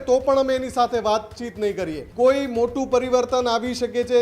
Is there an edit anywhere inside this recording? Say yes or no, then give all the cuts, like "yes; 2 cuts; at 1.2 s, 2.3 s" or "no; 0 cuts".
yes; 1 cut; at 2.0 s